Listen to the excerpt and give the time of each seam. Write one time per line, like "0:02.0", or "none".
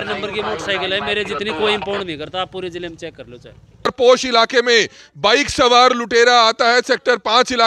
0:03.9